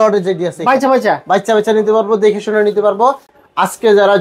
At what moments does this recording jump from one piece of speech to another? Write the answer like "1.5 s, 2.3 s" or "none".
none